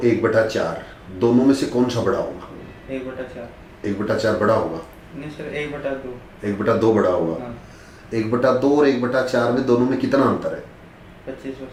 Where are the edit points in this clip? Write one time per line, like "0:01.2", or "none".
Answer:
none

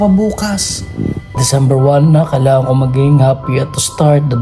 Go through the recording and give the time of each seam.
0:01.4

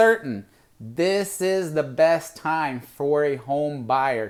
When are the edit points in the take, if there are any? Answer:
none

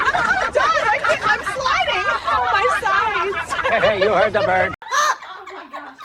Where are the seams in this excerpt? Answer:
0:04.8

